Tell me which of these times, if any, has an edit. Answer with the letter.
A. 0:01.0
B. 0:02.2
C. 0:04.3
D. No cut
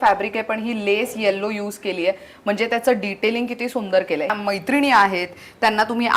C